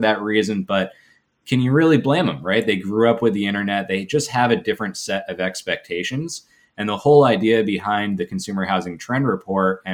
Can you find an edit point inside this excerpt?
no; 0 cuts

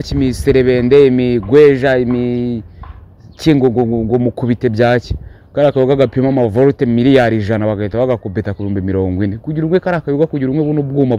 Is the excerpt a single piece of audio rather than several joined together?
yes; 0 cuts

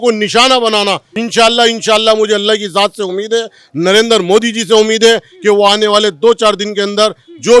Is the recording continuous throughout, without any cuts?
no; 1 cut; at 1.2 s

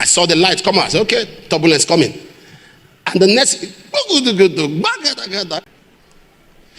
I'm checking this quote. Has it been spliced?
yes; 1 cut; at 5.6 s

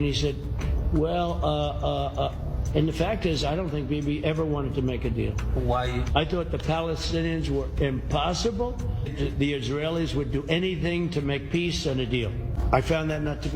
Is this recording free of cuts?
no; 2 cuts; at 9.1 s, 12.6 s

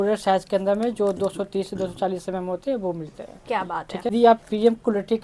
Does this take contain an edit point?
yes; 1 cut; at 4.1 s

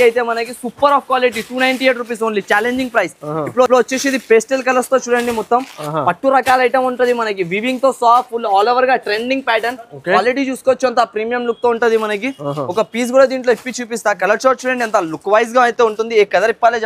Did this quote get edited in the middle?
no; 0 cuts

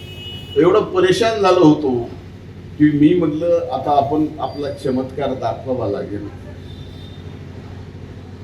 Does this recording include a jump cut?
no; 0 cuts

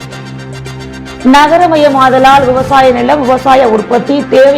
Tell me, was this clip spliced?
yes; 1 cut; at 1.0 s

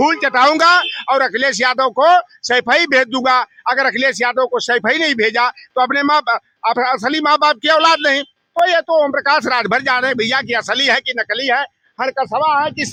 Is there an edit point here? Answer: no; 0 cuts

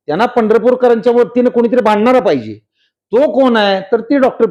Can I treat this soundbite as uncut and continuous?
yes; 0 cuts

